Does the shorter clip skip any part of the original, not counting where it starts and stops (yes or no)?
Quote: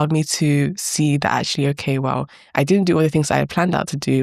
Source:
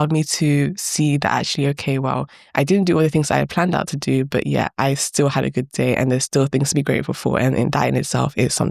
no